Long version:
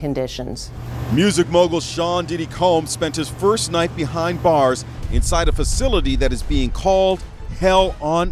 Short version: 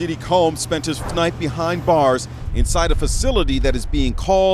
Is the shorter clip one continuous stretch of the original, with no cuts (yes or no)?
no